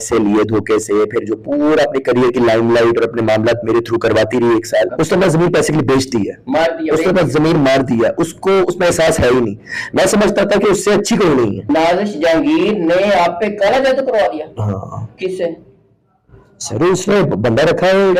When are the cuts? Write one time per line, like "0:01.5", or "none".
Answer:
0:04.9
0:11.7